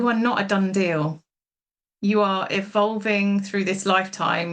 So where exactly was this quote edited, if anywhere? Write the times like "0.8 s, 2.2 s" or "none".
none

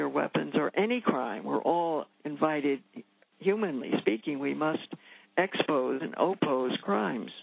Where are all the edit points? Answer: 2.2 s

